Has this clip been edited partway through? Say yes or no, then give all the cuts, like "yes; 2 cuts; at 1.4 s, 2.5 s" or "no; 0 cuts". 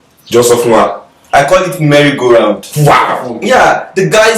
yes; 1 cut; at 3.3 s